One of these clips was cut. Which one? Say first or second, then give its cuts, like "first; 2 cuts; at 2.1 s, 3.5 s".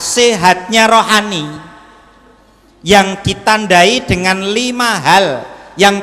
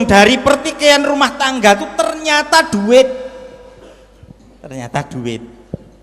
second; 1 cut; at 4.5 s